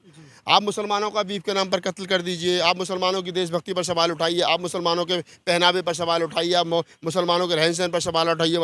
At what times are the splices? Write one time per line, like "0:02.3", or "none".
none